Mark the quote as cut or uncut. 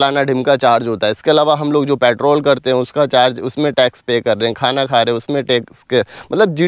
uncut